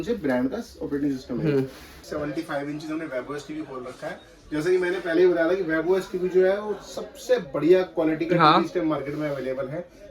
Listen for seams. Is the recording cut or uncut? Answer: cut